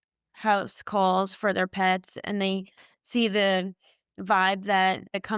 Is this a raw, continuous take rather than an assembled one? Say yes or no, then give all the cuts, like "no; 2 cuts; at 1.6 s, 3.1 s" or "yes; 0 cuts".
yes; 0 cuts